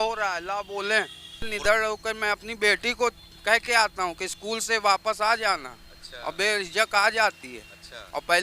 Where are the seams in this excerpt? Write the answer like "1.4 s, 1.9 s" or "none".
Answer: 1.5 s